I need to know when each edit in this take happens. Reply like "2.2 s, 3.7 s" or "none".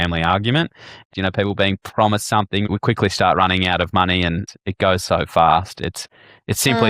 1.1 s, 2.7 s, 4.5 s